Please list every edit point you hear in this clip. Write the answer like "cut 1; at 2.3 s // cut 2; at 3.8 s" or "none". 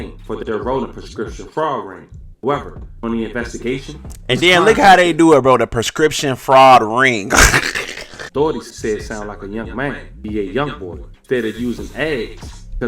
cut 1; at 8.1 s